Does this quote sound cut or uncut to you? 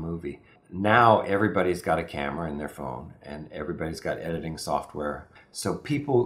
uncut